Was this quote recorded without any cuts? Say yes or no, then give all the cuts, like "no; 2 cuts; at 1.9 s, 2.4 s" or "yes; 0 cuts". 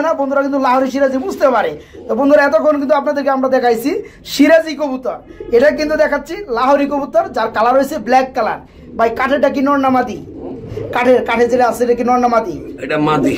yes; 0 cuts